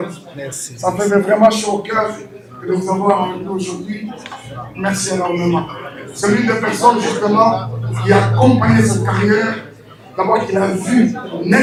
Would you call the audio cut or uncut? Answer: uncut